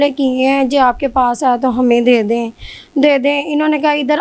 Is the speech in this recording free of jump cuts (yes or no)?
yes